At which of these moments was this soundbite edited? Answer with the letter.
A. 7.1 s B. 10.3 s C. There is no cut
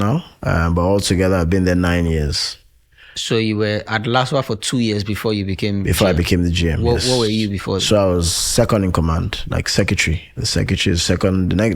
C